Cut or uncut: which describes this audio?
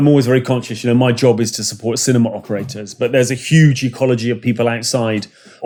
uncut